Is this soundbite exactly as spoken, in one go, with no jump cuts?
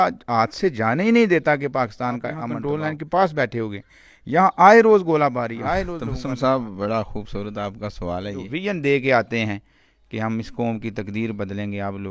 no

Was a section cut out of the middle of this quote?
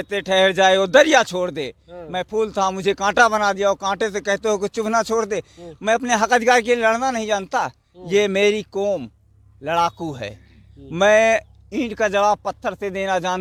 no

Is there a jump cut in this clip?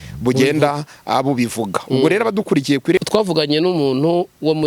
yes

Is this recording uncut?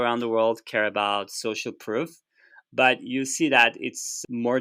yes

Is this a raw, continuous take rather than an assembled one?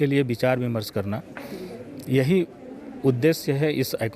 yes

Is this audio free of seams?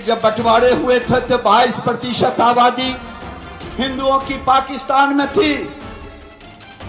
yes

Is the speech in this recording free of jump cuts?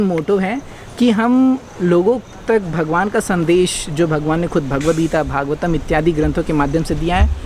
yes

